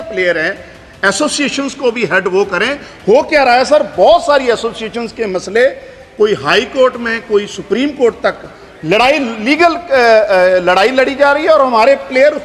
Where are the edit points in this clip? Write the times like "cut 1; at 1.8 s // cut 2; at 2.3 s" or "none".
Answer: none